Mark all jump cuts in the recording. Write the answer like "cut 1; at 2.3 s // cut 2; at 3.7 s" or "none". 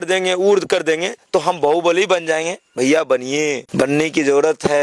cut 1; at 3.6 s